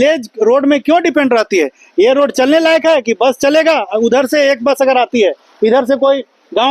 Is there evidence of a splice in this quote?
no; 0 cuts

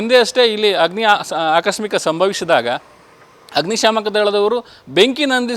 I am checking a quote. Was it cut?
yes; 1 cut; at 3.0 s

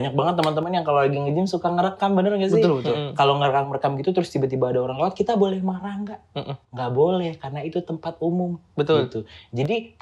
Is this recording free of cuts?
yes; 0 cuts

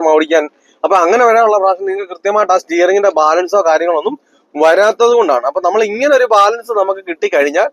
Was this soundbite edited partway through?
no; 0 cuts

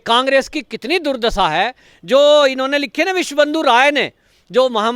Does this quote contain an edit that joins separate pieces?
yes; 1 cut; at 1.9 s

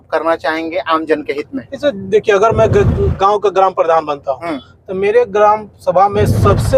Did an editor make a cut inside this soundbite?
no; 0 cuts

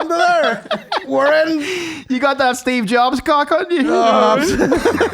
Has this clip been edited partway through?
no; 0 cuts

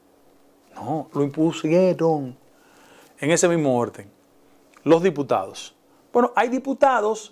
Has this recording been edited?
no; 0 cuts

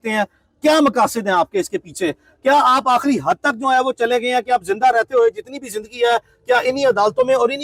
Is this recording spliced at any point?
no; 0 cuts

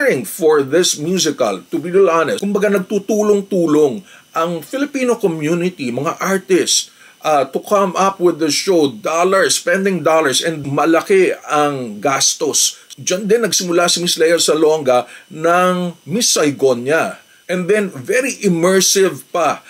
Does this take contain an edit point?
yes; 3 cuts; at 2.4 s, 10.6 s, 12.9 s

